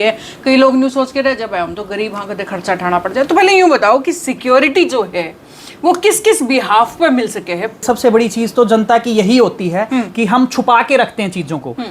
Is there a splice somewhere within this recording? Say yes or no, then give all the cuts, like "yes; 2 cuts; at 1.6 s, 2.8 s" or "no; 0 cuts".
yes; 1 cut; at 7.8 s